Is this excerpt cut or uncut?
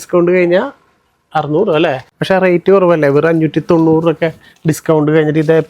cut